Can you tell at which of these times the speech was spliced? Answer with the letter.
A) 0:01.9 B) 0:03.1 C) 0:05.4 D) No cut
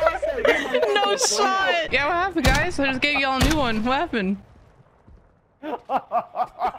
A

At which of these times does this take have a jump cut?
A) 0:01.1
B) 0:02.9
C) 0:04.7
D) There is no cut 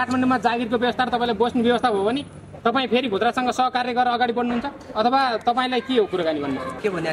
D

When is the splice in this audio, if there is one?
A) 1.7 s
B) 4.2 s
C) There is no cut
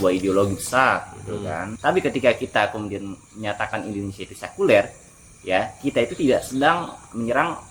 A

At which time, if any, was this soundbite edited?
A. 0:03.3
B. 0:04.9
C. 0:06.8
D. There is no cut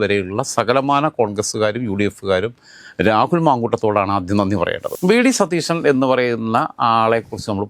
B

